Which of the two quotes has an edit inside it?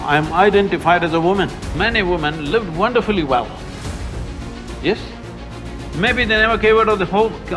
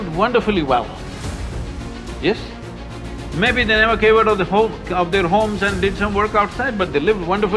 first; 1 cut; at 1.6 s

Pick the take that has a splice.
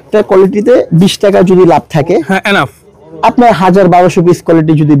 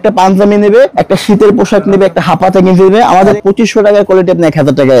second; 2 cuts; at 0.9 s, 3.3 s

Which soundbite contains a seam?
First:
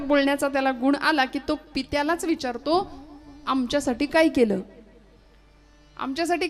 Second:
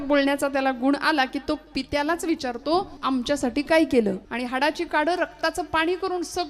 second; 2 cuts; at 2.9 s, 4.3 s

